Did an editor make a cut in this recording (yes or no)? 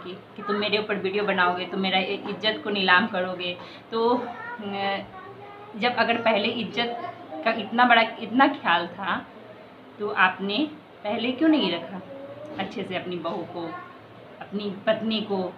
no